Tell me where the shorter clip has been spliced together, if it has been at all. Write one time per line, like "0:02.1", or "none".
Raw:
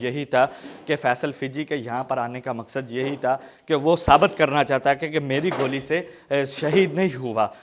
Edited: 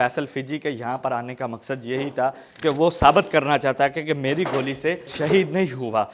0:05.1